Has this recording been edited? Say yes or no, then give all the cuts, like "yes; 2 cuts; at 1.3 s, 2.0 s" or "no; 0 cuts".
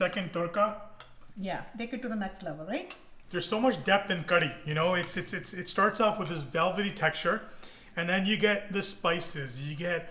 no; 0 cuts